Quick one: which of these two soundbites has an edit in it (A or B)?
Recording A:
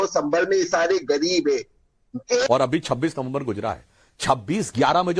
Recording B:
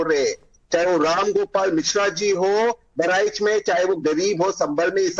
A